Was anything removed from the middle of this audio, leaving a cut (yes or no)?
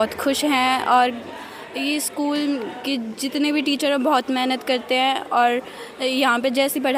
no